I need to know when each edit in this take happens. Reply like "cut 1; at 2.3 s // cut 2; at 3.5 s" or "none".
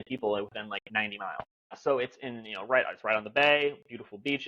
cut 1; at 1.8 s